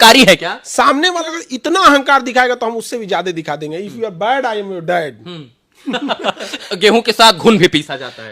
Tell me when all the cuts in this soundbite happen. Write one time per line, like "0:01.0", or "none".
0:01.2
0:06.7